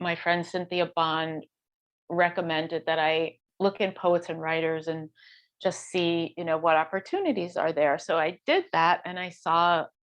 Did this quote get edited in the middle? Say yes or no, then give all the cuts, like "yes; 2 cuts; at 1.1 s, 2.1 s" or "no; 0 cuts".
yes; 1 cut; at 3.4 s